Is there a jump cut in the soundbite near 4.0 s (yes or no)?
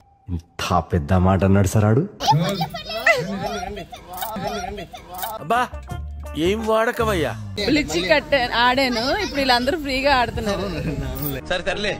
no